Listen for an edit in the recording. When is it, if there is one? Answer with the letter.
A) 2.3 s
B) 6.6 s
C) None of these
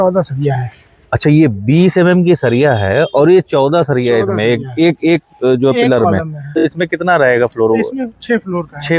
B